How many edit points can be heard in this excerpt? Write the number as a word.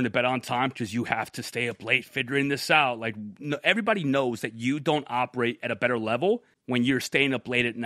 one